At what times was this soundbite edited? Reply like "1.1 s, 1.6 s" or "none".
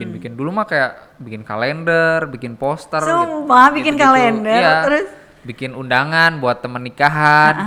none